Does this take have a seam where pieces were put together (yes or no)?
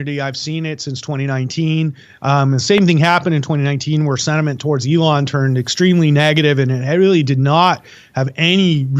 yes